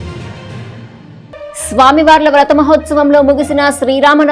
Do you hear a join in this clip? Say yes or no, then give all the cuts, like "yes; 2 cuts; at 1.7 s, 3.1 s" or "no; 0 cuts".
yes; 1 cut; at 1.5 s